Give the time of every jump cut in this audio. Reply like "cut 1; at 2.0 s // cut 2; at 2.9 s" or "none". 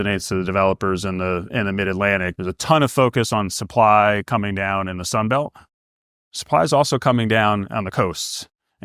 cut 1; at 2.3 s

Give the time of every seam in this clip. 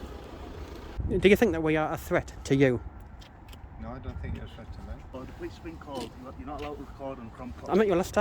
cut 1; at 1.0 s // cut 2; at 5.2 s

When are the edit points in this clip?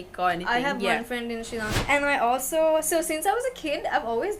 cut 1; at 1.8 s

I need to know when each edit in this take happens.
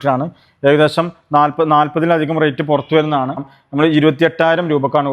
cut 1; at 3.6 s

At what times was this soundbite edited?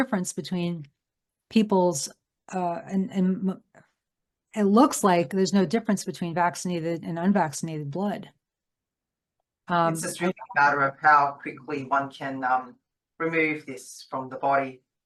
none

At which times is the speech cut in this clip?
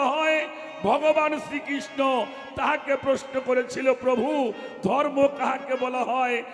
none

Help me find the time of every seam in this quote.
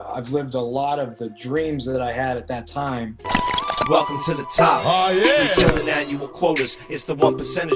cut 1; at 3.3 s

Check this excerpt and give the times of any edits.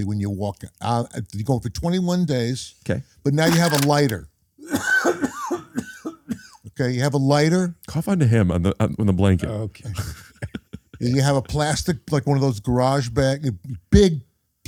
none

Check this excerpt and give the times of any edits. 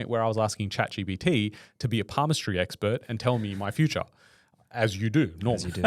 none

